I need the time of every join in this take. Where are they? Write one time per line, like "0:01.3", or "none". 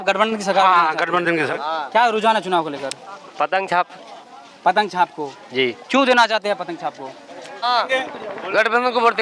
0:01.5
0:07.7